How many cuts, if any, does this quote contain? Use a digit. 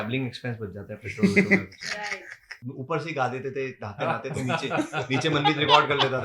1